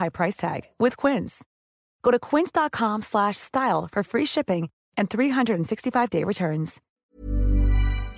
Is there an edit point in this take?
yes; 1 cut; at 7.0 s

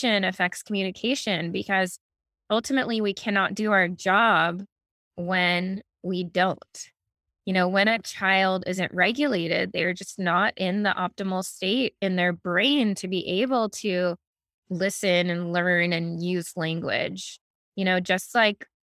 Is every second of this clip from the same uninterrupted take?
yes; 0 cuts

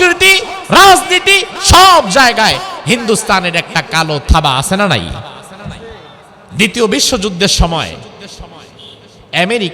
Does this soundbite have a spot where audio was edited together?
yes; 1 cut; at 6.4 s

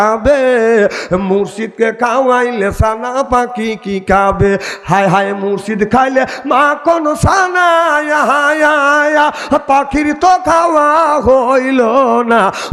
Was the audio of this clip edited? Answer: no; 0 cuts

